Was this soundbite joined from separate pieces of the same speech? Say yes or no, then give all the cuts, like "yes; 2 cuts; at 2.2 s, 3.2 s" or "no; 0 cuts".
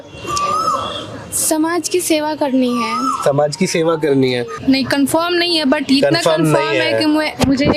yes; 1 cut; at 4.5 s